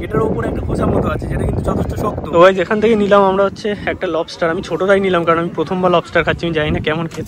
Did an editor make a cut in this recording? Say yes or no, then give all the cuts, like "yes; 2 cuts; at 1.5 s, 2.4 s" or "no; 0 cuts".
yes; 1 cut; at 2.4 s